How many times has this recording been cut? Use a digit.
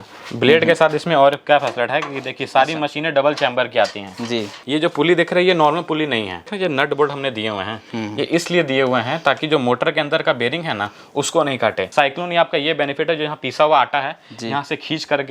3